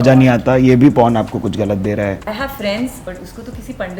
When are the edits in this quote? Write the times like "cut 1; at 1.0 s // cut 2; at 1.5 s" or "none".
cut 1; at 2.2 s // cut 2; at 3.0 s